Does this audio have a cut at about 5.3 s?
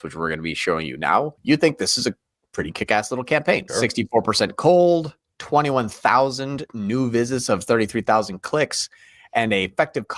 no; 2 cuts; at 1.4 s, 3.7 s

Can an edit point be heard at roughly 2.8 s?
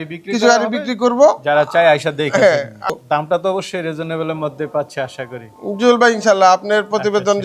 yes; 1 cut; at 2.8 s

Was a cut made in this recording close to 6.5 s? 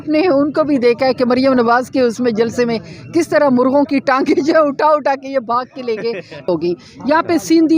yes; 1 cut; at 6.5 s

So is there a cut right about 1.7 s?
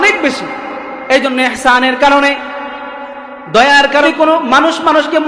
no; 1 cut; at 4.1 s

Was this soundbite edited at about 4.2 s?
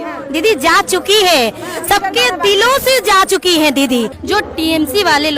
yes; 1 cut; at 4.2 s

